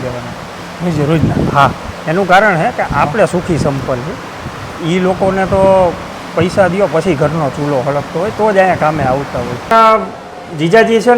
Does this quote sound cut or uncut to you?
cut